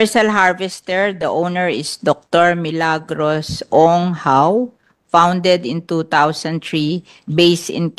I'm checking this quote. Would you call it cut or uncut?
uncut